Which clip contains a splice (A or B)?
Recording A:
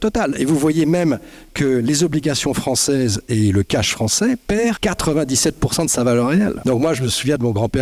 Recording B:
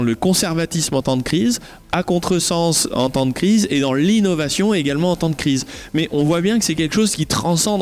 A